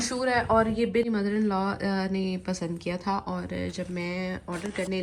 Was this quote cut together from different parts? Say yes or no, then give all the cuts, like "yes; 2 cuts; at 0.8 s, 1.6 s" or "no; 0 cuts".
yes; 1 cut; at 1.1 s